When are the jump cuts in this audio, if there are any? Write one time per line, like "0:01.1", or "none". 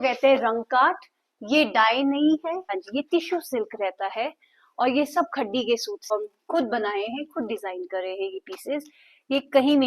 0:02.7
0:06.1